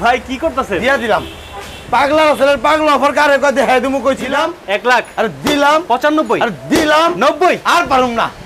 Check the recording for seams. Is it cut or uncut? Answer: cut